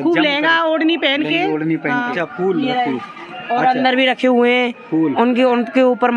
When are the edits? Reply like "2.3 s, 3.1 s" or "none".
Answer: 2.0 s